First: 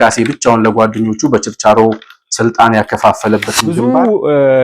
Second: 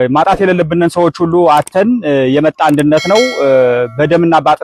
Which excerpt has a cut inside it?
first; 1 cut; at 3.6 s

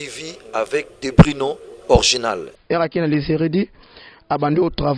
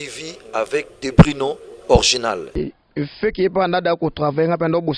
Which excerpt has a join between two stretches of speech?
first; 1 cut; at 2.5 s

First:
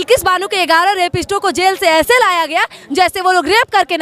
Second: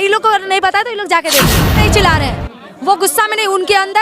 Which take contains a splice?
second; 1 cut; at 1.6 s

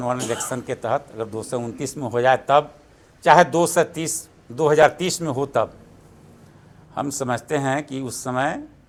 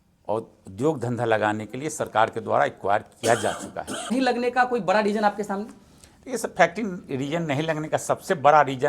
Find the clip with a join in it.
second; 1 cut; at 4.1 s

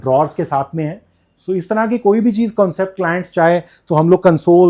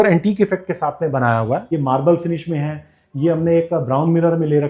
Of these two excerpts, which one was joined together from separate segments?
second; 1 cut; at 1.6 s

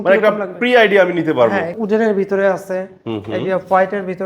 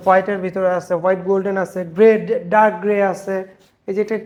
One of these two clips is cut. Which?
first; 1 cut; at 1.7 s

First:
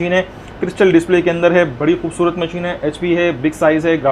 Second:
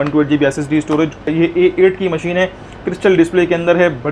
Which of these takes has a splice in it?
second; 1 cut; at 1.3 s

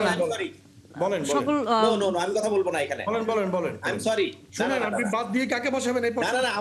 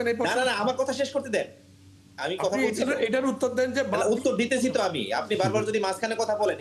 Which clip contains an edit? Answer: first; 1 cut; at 4.4 s

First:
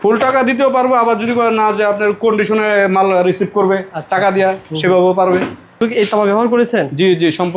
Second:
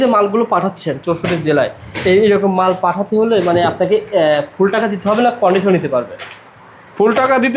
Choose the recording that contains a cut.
first; 1 cut; at 5.8 s

